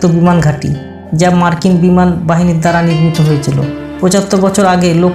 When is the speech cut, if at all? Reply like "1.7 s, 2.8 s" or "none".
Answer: none